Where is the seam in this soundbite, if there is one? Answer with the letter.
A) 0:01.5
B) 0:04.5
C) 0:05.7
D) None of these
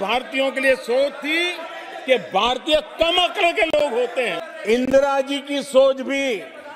B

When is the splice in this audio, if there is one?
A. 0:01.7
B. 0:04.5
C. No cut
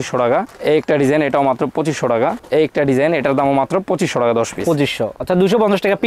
C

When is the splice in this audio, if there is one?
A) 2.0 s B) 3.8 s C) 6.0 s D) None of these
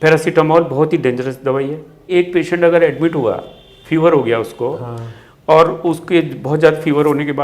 A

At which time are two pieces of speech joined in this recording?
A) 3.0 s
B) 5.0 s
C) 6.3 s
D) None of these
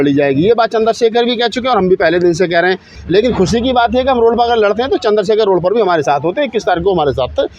A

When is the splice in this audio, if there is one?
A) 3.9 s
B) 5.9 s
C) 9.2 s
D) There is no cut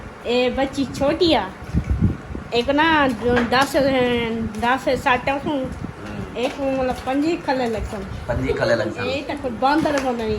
C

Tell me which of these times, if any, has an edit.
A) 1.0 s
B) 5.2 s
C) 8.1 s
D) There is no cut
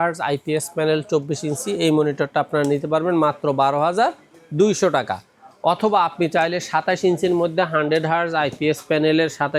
D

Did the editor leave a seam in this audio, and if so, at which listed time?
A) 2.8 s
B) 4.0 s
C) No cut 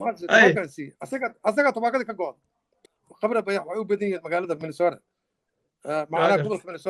A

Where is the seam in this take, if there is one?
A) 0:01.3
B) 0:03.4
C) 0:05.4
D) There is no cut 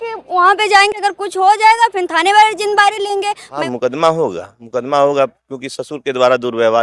B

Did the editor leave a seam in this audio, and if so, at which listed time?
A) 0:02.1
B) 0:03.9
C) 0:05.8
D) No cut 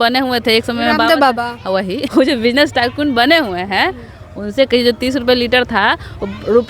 A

